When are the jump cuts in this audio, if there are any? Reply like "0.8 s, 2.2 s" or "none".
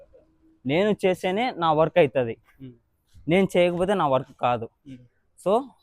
none